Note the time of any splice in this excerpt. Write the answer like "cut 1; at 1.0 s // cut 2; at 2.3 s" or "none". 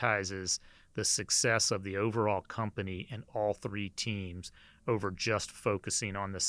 none